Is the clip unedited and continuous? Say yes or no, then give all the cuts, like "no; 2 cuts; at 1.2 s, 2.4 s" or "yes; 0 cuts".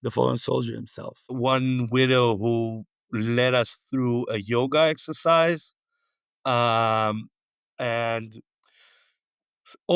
no; 1 cut; at 1.2 s